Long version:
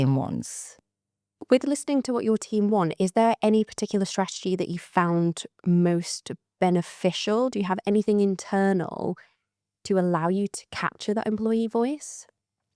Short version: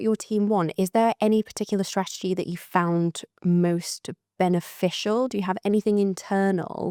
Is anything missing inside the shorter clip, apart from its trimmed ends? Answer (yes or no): no